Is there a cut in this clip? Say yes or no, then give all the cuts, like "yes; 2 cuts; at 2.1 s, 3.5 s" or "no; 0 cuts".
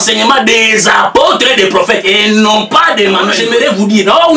yes; 1 cut; at 3.4 s